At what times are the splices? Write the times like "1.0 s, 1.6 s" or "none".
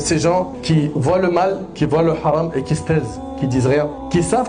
none

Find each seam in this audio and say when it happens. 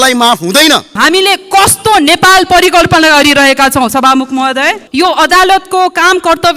1.0 s, 4.8 s

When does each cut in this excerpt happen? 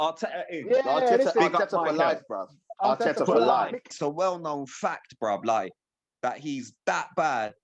3.9 s

